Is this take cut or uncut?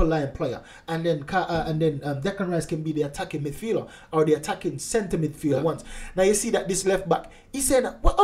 cut